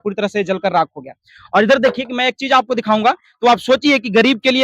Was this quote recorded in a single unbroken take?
yes; 0 cuts

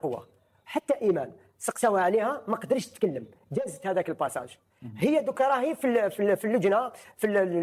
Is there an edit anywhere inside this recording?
no; 0 cuts

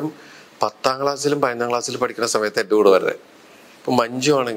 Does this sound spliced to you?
no; 0 cuts

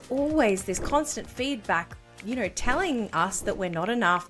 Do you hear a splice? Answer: no; 0 cuts

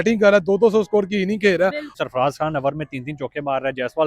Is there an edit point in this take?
yes; 1 cut; at 1.9 s

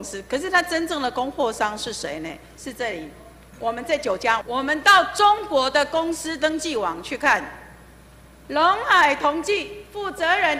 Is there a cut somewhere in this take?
yes; 1 cut; at 4.4 s

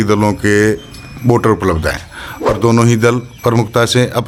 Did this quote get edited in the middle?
no; 0 cuts

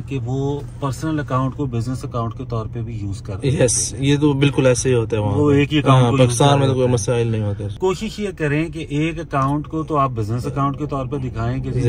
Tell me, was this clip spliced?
no; 0 cuts

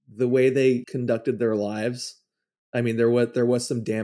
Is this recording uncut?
no; 1 cut; at 0.9 s

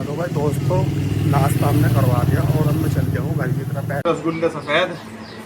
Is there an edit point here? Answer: yes; 1 cut; at 4.0 s

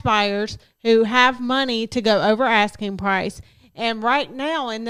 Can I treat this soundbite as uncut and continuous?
yes; 0 cuts

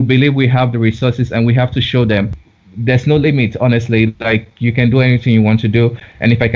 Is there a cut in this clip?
yes; 1 cut; at 2.4 s

